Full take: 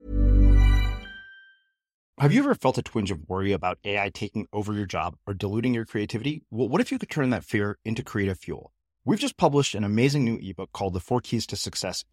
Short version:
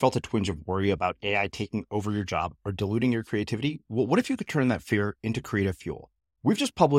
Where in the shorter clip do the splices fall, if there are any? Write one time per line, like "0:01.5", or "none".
none